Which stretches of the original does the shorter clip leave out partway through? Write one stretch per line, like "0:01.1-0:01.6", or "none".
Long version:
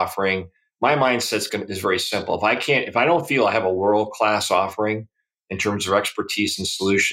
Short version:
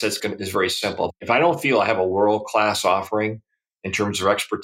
0:02.4-0:02.8

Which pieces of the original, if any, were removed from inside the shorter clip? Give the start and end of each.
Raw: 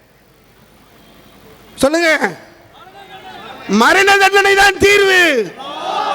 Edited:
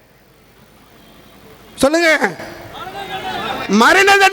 none

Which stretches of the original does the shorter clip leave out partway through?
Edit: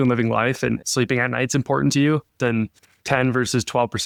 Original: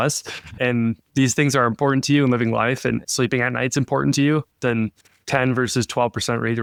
none

